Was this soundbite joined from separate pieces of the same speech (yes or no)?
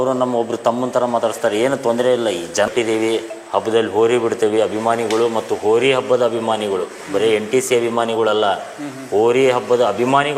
yes